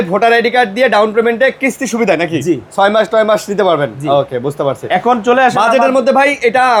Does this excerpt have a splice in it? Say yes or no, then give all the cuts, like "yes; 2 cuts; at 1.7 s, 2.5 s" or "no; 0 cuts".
no; 0 cuts